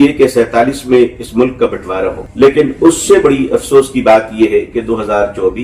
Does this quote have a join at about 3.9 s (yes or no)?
no